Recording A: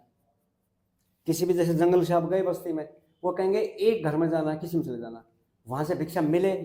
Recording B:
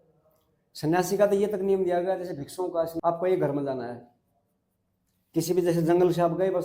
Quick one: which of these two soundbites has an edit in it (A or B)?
B